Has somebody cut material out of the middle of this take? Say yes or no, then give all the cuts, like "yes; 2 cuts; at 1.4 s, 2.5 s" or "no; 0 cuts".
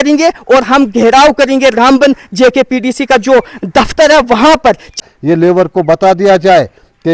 yes; 1 cut; at 5.0 s